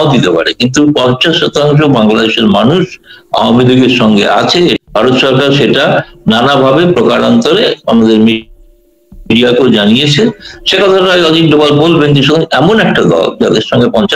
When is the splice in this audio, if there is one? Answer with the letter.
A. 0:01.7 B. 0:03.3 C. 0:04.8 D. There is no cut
C